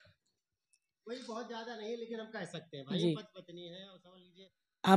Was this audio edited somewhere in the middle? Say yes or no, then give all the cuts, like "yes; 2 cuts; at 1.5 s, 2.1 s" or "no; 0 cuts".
yes; 1 cut; at 4.1 s